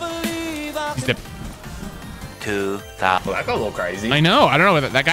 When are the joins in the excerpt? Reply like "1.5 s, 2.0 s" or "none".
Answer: 1.2 s